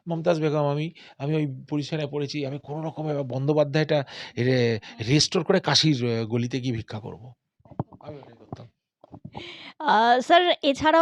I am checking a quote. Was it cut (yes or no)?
no